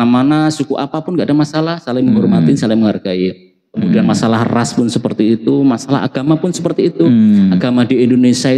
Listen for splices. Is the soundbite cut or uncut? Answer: uncut